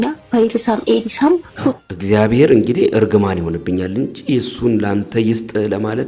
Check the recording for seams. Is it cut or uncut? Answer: cut